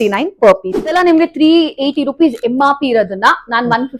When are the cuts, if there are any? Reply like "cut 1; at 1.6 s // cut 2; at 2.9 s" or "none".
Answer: cut 1; at 0.9 s